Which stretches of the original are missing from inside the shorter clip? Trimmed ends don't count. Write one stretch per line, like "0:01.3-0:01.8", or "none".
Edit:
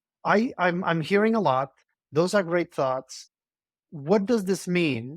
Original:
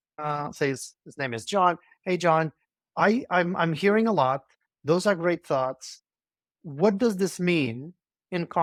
none